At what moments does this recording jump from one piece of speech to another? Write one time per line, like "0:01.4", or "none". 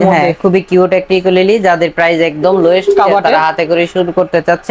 none